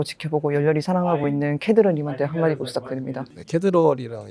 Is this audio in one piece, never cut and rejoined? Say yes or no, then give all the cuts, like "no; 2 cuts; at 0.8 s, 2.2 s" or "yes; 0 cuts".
no; 1 cut; at 3.4 s